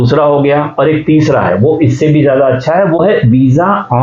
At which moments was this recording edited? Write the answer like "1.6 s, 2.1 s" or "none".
3.0 s